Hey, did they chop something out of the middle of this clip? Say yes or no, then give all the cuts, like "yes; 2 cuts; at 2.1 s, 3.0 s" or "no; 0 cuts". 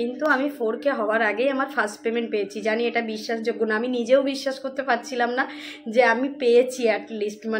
no; 0 cuts